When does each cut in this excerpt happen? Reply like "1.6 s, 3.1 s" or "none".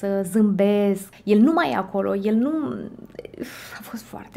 1.1 s